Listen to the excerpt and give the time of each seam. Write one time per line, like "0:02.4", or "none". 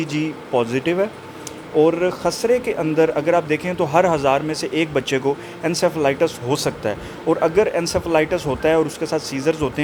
none